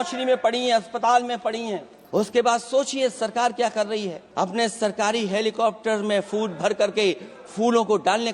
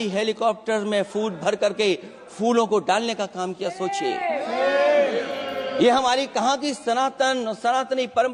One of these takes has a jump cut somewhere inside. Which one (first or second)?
first